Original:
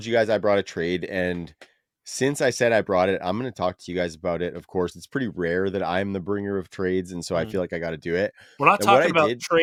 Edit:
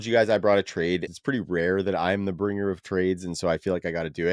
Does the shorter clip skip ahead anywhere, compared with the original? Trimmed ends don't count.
yes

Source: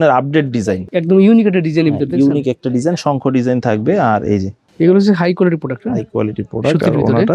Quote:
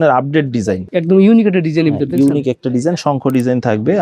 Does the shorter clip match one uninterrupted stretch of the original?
yes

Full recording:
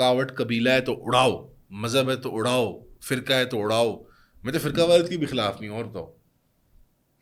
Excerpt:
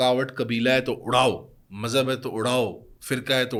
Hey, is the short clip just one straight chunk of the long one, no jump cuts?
yes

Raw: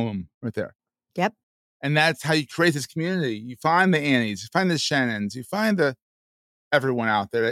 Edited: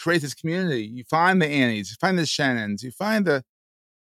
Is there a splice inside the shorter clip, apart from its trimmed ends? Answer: no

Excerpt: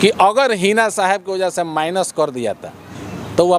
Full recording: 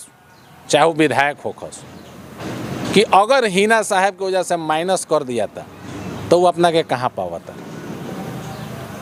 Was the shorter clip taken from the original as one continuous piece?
yes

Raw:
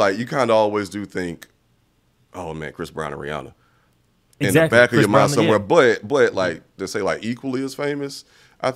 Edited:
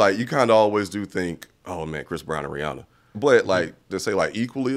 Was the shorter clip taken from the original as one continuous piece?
no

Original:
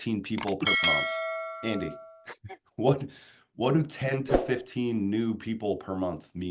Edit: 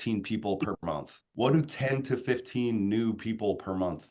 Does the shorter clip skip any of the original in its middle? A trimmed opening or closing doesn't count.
yes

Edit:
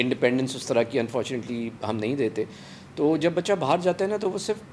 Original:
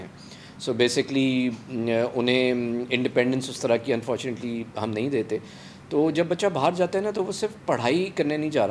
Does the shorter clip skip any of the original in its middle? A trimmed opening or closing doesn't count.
no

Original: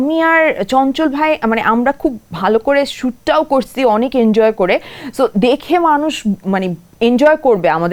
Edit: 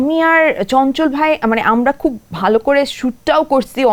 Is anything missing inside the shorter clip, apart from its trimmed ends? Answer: no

